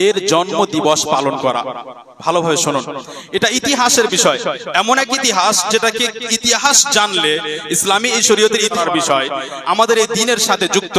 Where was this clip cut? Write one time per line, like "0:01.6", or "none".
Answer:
0:08.8